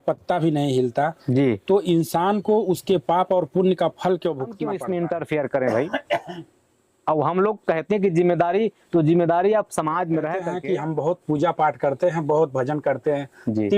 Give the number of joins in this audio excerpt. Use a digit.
2